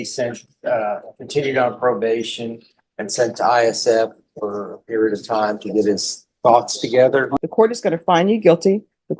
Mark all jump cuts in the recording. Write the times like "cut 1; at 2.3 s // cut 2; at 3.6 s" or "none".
cut 1; at 7.3 s